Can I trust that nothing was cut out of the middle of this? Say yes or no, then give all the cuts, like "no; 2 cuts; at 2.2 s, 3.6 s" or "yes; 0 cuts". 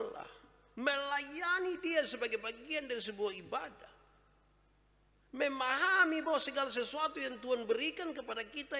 yes; 0 cuts